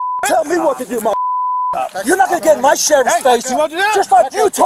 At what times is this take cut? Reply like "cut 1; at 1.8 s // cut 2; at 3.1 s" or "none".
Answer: none

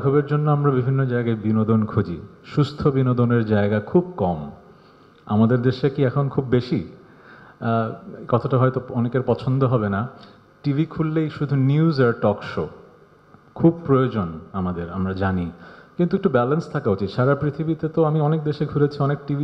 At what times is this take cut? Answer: none

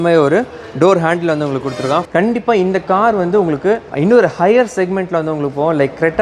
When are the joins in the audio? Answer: cut 1; at 2.1 s // cut 2; at 3.9 s

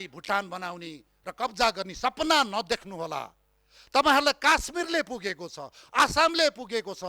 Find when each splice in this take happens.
none

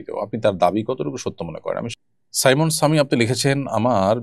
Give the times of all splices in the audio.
cut 1; at 1.9 s

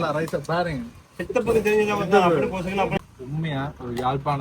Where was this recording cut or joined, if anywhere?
cut 1; at 2.9 s

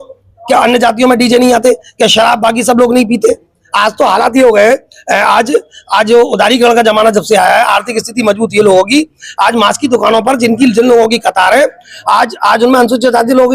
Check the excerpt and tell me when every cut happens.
none

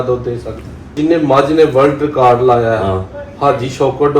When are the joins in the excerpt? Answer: cut 1; at 1.0 s

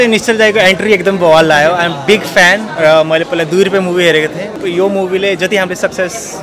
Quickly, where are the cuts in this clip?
cut 1; at 4.6 s

